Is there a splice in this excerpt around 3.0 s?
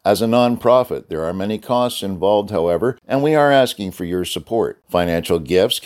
yes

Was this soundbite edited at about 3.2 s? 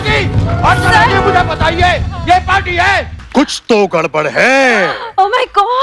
yes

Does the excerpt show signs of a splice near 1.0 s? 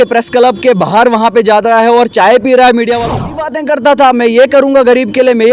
no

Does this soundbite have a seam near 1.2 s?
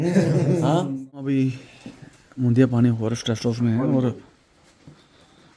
yes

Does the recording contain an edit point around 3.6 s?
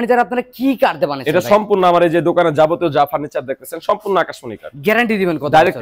no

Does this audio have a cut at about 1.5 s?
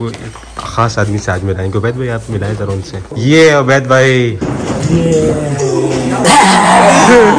no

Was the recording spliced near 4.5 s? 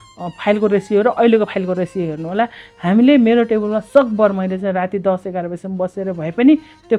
no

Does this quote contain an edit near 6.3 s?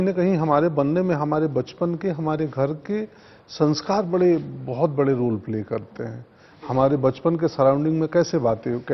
no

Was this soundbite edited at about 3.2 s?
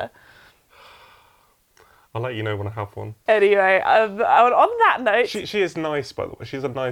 yes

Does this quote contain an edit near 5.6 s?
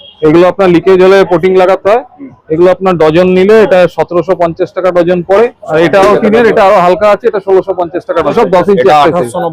yes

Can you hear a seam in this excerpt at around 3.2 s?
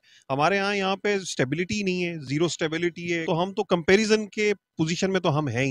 yes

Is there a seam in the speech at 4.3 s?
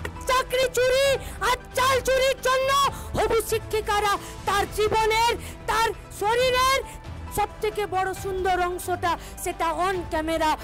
no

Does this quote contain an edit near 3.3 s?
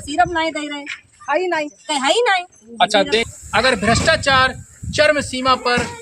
yes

